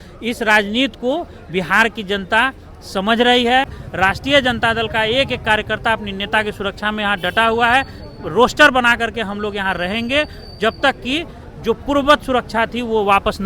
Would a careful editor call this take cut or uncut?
cut